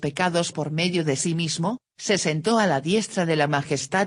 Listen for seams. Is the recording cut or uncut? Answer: uncut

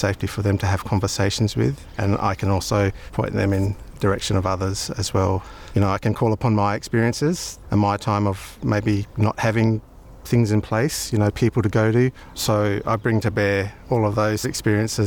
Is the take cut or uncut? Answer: cut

